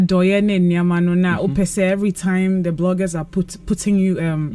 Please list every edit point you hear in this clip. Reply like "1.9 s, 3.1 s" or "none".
none